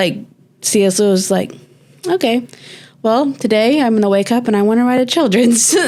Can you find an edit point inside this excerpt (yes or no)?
no